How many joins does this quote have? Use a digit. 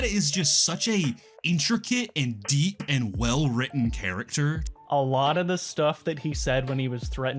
2